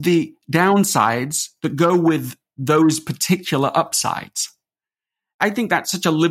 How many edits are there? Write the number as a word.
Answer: one